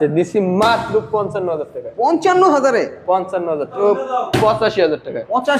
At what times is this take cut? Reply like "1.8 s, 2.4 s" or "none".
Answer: 3.8 s

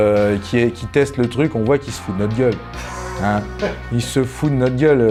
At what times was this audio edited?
none

